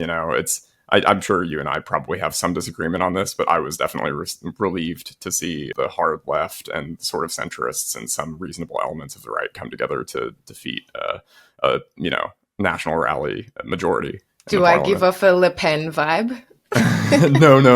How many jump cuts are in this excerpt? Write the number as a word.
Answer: one